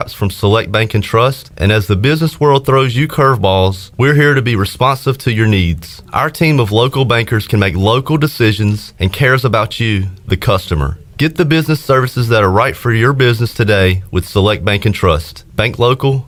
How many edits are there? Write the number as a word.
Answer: zero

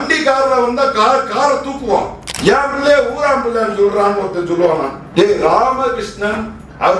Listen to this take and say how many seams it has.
two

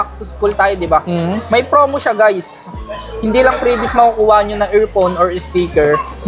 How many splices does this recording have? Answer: zero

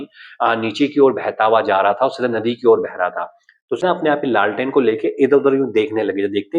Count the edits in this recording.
one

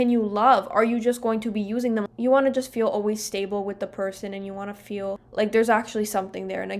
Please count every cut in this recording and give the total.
two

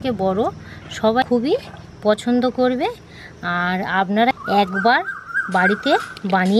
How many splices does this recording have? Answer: two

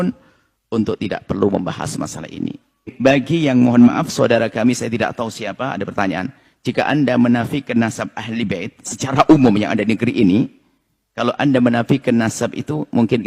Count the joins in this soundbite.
one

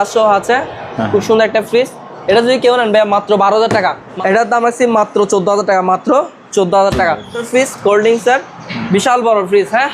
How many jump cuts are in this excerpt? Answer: two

